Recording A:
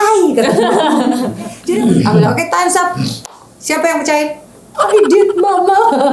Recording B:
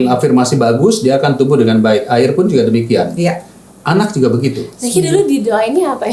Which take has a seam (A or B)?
A